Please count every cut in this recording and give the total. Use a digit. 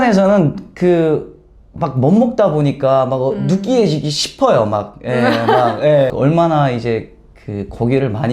1